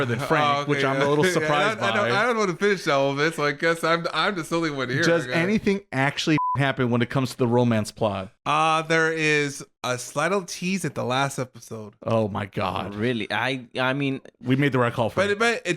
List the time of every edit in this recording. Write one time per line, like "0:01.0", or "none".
0:06.4
0:08.3